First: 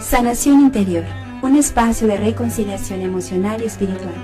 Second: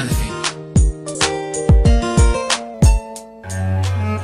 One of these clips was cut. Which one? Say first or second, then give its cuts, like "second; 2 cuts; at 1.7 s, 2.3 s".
first; 1 cut; at 1.3 s